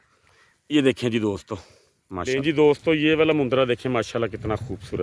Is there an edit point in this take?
yes; 1 cut; at 2.4 s

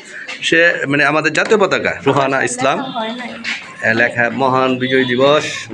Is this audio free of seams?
no; 1 cut; at 2.0 s

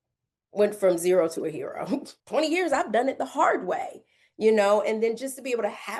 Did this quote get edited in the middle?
yes; 1 cut; at 2.2 s

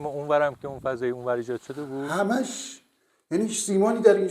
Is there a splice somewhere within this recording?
yes; 1 cut; at 2.1 s

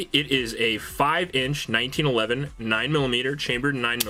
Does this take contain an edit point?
no; 0 cuts

